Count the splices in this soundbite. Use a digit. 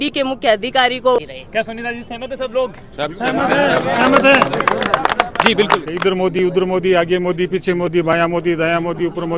2